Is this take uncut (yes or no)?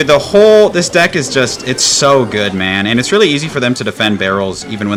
yes